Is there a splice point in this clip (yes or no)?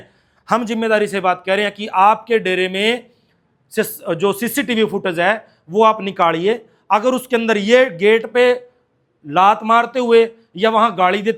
no